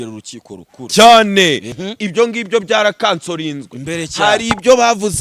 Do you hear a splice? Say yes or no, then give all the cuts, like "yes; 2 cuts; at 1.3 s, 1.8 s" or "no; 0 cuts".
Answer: yes; 1 cut; at 1.7 s